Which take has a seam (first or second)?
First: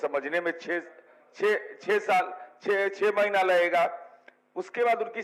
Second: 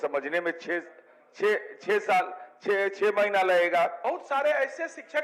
second